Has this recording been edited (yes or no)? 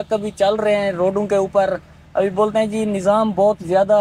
no